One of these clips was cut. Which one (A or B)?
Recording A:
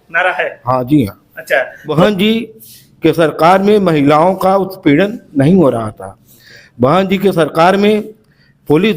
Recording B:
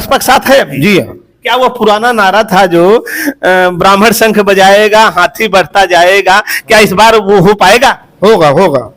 A